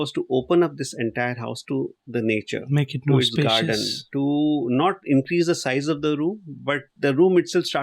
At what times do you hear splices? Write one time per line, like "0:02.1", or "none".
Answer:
0:06.9